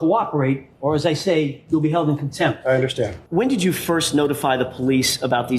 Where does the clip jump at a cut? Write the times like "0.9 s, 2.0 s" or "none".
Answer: 3.2 s